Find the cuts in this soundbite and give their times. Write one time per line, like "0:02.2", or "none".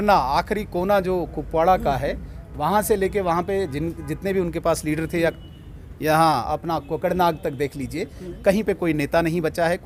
none